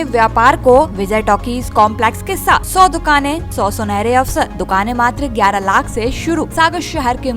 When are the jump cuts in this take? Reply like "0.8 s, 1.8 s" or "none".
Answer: 1.0 s, 2.7 s, 3.5 s, 4.6 s, 6.5 s